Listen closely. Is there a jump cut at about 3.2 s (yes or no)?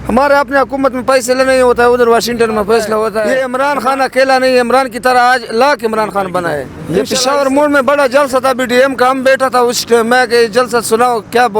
yes